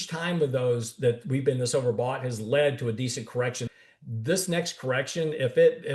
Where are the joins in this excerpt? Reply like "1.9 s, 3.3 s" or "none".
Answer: 3.7 s